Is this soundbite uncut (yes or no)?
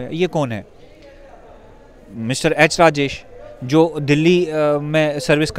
yes